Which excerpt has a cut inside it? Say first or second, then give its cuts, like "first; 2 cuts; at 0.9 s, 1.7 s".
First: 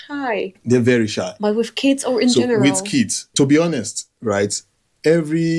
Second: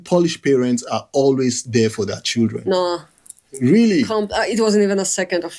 first; 1 cut; at 3.3 s